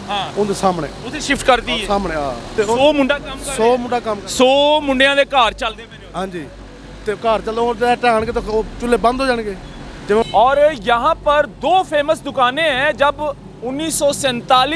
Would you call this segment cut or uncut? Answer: cut